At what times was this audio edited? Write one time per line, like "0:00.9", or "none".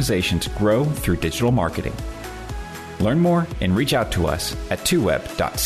none